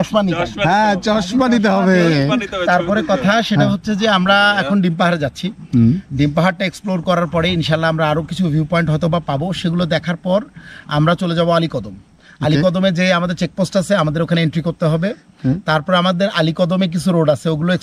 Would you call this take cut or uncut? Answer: uncut